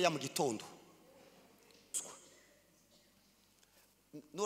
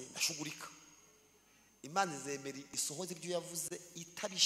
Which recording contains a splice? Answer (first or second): first